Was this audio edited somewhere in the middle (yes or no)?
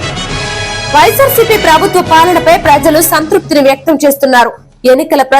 yes